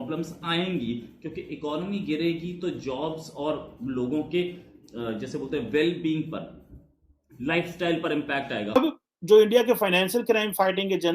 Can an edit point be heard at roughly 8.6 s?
yes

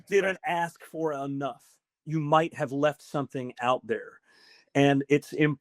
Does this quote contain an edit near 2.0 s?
yes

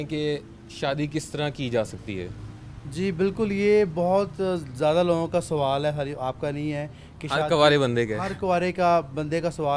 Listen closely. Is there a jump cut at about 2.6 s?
no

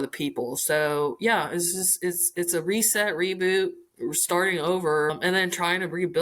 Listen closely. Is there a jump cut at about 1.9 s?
no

